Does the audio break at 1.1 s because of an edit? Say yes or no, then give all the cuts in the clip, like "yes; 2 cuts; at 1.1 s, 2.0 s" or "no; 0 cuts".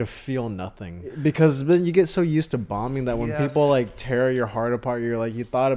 yes; 1 cut; at 1.1 s